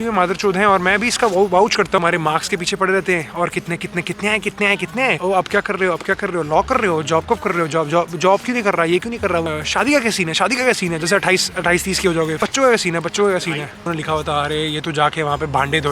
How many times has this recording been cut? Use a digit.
5